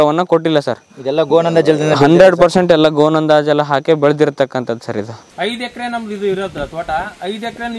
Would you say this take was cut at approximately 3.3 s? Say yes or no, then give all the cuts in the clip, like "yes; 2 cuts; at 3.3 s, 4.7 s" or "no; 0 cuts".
no; 1 cut; at 5.2 s